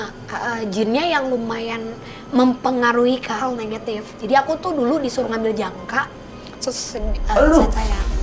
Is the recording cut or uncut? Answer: uncut